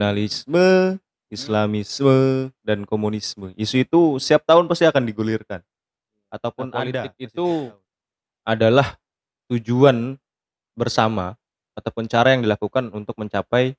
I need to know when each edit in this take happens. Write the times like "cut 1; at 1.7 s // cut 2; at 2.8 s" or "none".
cut 1; at 7.1 s